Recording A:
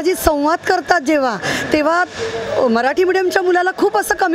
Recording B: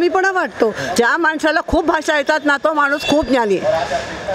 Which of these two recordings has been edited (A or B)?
B